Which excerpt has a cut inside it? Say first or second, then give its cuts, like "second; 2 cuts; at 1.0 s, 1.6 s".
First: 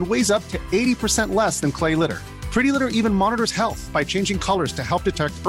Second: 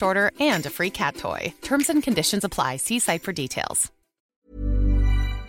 second; 1 cut; at 4.2 s